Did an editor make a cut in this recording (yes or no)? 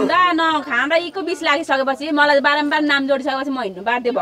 no